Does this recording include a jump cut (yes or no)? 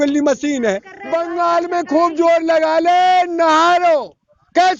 yes